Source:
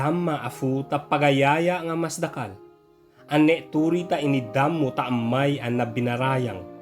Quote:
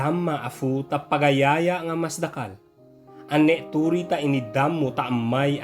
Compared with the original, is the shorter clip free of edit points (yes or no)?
yes